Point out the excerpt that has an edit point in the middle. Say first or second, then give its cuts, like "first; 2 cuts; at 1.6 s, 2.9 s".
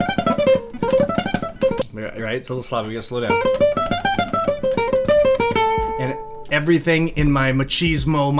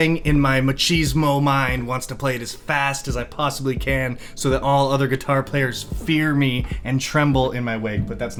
first; 1 cut; at 1.8 s